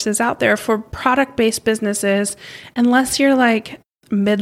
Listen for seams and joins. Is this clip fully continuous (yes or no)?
yes